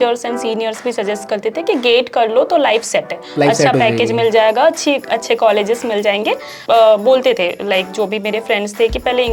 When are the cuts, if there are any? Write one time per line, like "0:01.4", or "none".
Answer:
0:06.5